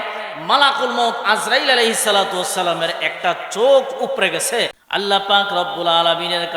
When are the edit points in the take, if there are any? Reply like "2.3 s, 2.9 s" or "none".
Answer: 4.8 s